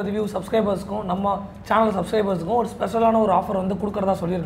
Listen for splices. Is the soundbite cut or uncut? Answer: uncut